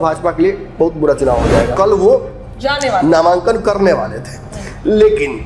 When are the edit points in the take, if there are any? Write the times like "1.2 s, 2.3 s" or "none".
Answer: 1.7 s